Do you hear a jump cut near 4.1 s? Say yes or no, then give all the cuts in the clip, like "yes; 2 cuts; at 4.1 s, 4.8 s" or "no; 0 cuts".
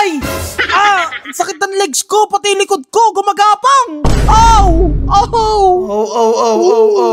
no; 0 cuts